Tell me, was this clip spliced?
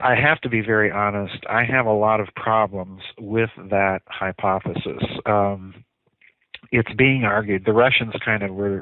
yes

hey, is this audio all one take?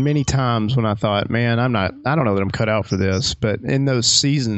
yes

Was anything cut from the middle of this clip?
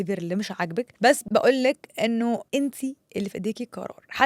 yes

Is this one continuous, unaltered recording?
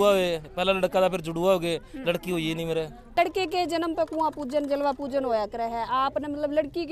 no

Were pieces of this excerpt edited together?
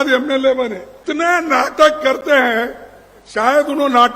yes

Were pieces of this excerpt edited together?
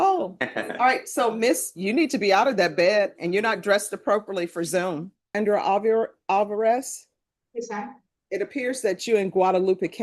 yes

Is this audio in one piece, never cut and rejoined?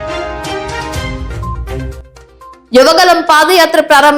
yes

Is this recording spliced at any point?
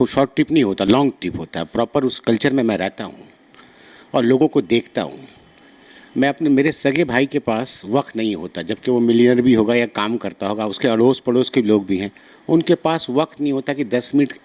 no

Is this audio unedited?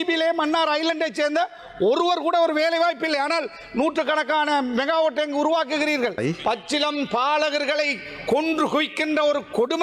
no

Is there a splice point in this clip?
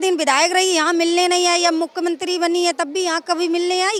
no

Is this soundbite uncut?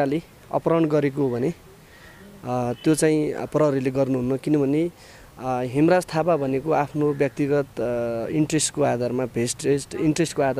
yes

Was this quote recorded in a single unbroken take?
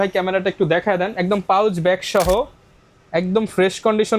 yes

